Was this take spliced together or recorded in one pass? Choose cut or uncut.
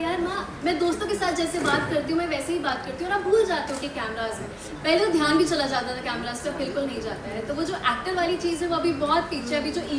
uncut